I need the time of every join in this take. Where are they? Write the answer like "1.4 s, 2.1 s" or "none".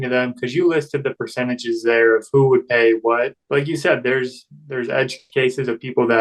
3.4 s